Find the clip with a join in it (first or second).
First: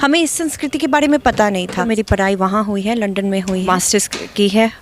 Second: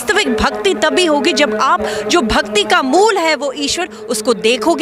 first